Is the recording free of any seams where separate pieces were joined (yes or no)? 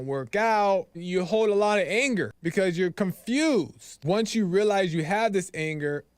no